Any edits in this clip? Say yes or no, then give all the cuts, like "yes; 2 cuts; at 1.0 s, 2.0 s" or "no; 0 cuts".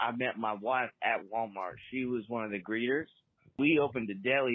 yes; 1 cut; at 3.6 s